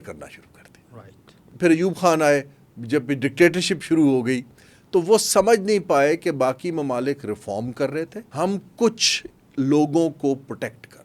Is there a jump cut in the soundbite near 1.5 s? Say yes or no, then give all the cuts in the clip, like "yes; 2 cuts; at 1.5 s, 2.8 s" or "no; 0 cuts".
yes; 2 cuts; at 1.5 s, 8.2 s